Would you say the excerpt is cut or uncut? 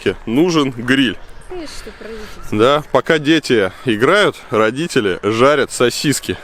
uncut